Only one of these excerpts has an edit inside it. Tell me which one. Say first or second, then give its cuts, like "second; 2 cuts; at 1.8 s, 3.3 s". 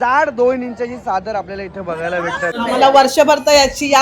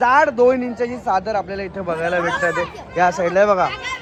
first; 1 cut; at 2.5 s